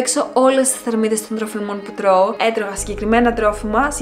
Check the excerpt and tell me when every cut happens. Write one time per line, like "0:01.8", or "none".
0:02.3